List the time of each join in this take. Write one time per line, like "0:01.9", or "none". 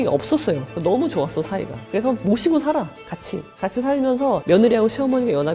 0:04.4